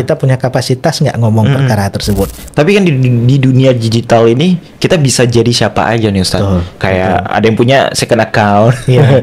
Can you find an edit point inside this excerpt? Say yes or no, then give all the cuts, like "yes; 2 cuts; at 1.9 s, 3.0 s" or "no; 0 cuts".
yes; 1 cut; at 2.4 s